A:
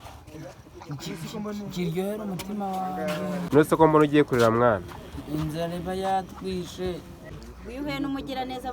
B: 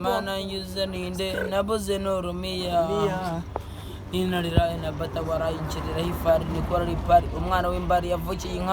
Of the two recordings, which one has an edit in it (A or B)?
A